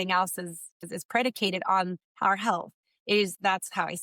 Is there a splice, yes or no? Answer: yes